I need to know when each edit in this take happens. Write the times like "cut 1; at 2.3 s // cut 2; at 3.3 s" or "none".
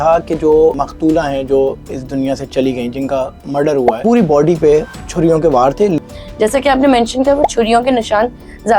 cut 1; at 0.8 s // cut 2; at 4.0 s // cut 3; at 6.0 s